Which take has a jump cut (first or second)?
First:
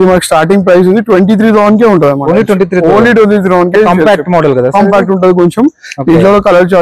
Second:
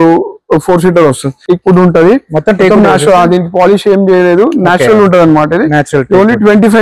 second